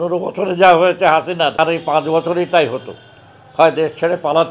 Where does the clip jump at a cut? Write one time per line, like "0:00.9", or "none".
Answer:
0:01.5